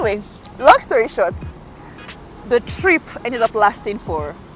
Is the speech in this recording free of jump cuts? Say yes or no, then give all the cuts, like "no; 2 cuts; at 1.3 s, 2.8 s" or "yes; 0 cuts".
yes; 0 cuts